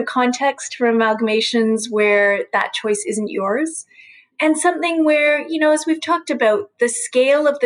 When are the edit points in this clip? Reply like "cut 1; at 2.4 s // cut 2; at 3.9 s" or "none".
cut 1; at 4.3 s